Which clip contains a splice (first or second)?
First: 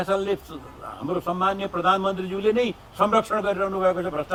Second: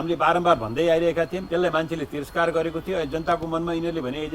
second